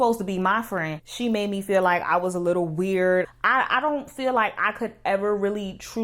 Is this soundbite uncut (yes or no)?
no